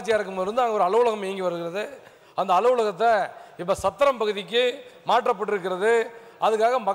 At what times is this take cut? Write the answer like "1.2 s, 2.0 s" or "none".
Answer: none